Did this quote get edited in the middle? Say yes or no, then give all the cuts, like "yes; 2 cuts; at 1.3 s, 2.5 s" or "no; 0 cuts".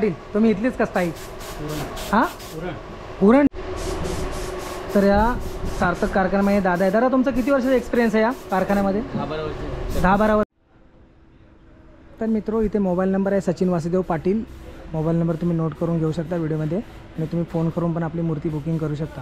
yes; 2 cuts; at 3.5 s, 10.5 s